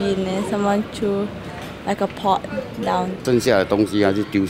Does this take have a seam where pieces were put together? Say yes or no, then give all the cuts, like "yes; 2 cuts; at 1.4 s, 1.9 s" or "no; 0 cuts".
yes; 1 cut; at 3.2 s